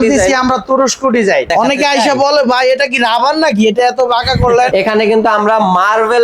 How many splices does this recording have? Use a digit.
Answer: 2